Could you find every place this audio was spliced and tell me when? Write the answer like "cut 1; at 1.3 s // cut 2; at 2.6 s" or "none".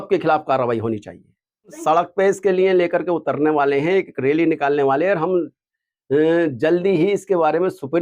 cut 1; at 1.8 s